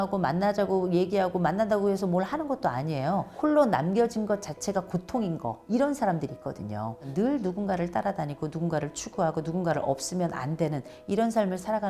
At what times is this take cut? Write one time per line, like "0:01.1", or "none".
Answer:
0:03.3
0:07.1